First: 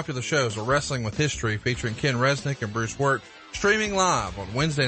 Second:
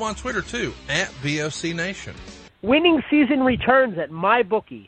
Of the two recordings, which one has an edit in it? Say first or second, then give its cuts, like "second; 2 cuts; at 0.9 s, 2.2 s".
second; 1 cut; at 2.5 s